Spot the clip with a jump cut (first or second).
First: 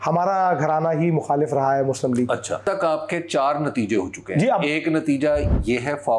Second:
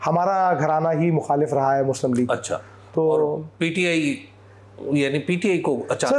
first